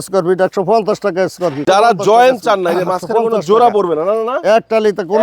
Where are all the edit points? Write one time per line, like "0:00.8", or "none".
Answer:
0:01.6